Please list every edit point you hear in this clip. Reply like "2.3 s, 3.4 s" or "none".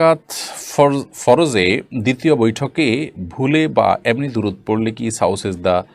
none